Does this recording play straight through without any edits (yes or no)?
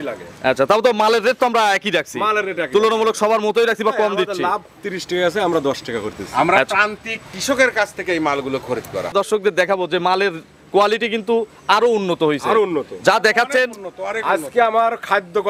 no